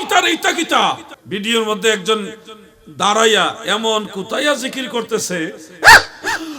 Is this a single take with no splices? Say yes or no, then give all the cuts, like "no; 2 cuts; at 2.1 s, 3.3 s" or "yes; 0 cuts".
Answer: no; 1 cut; at 1.1 s